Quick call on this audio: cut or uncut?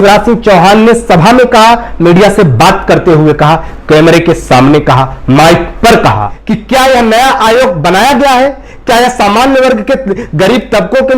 cut